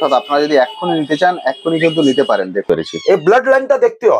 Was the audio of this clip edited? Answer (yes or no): yes